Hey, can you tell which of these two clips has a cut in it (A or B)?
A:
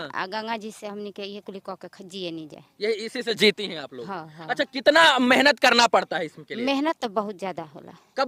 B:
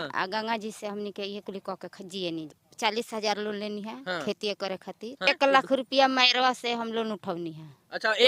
B